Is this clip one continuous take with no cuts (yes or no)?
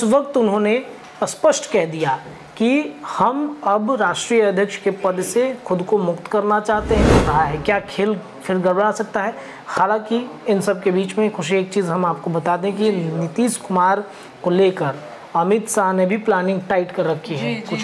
no